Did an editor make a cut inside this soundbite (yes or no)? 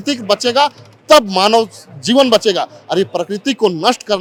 no